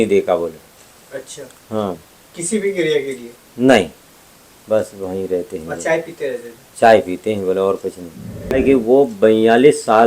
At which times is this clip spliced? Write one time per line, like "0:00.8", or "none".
0:08.6